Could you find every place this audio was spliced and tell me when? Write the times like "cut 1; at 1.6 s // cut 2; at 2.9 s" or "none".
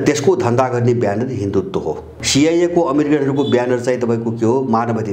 cut 1; at 2.1 s